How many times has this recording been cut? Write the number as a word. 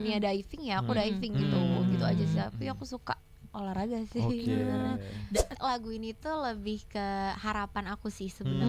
one